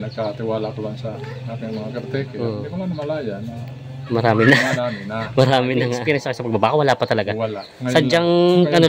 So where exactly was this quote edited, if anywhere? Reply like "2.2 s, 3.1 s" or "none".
2.7 s, 6.0 s